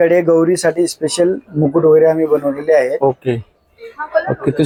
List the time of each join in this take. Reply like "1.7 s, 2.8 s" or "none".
none